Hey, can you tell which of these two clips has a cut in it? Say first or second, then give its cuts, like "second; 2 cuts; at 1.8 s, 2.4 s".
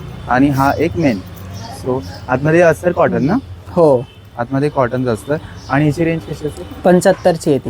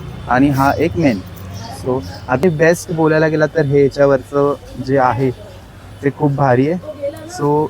second; 1 cut; at 2.4 s